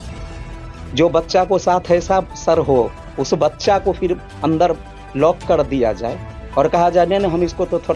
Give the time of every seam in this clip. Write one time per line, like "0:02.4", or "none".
none

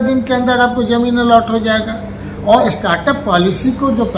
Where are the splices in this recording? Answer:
none

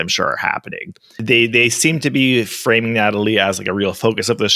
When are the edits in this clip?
0:01.2

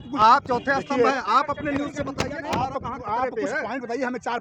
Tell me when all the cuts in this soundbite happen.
none

